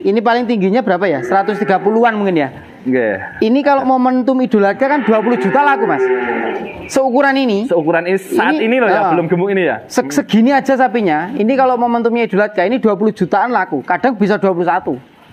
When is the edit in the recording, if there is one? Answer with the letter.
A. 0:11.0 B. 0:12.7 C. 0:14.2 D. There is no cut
D